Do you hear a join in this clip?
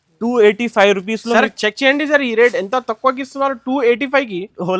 no; 0 cuts

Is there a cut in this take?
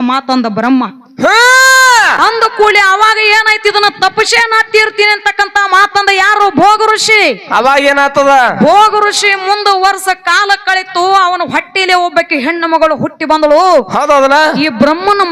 no; 0 cuts

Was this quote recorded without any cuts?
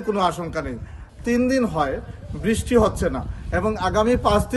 no; 1 cut; at 1.0 s

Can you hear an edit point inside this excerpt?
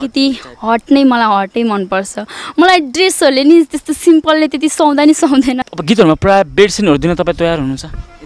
yes; 1 cut; at 5.7 s

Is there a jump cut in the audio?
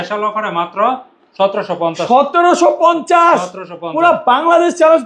no; 0 cuts

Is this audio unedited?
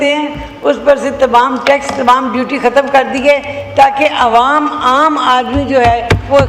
yes; 0 cuts

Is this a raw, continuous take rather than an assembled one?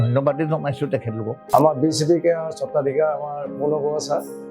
no; 1 cut; at 1.3 s

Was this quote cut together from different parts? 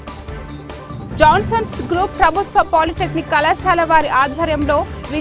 no; 0 cuts

